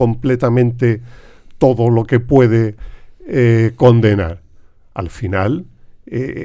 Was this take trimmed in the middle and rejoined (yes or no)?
no